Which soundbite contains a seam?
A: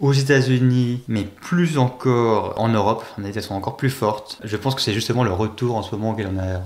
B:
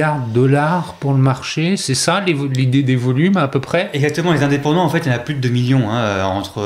A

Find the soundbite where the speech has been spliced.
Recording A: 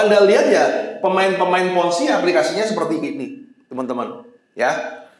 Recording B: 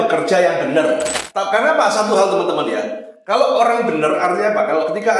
B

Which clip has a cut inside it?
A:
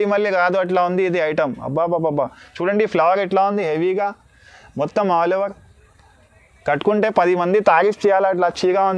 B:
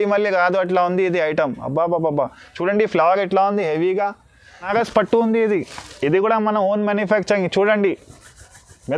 B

